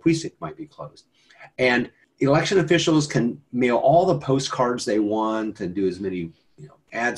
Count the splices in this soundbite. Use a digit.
1